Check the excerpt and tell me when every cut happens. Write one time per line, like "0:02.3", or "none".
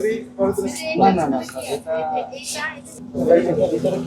none